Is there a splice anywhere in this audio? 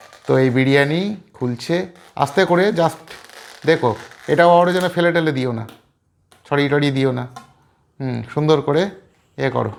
no; 0 cuts

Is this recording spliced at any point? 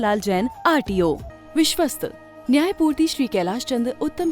yes; 1 cut; at 1.3 s

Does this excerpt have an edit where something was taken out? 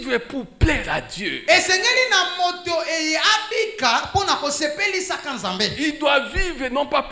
no; 0 cuts

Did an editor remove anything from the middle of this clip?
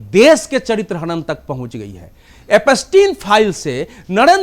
no; 0 cuts

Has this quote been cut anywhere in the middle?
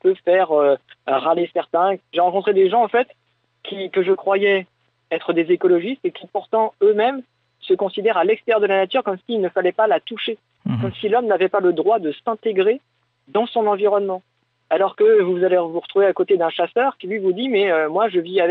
yes; 1 cut; at 2.0 s

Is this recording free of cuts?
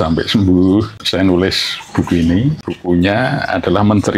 no; 2 cuts; at 1.0 s, 2.6 s

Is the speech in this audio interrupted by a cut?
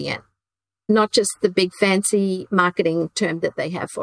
no; 0 cuts

